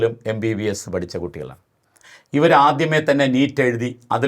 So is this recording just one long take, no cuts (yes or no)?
yes